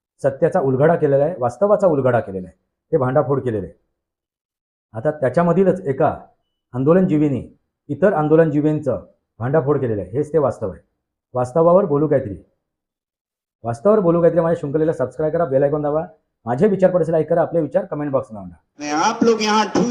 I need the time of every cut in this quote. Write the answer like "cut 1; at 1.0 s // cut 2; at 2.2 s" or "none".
cut 1; at 18.8 s